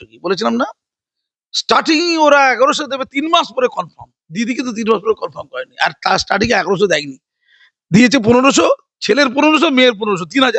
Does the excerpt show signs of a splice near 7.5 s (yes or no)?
no